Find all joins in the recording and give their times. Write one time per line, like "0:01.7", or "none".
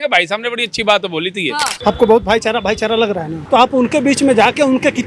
0:01.7
0:03.4